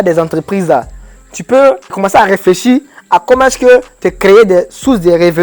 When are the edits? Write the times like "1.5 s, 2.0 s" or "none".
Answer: 1.9 s